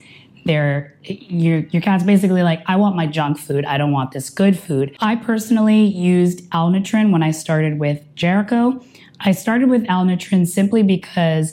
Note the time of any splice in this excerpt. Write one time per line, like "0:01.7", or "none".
0:04.9